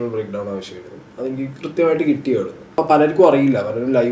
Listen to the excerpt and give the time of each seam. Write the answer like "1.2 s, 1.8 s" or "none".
2.7 s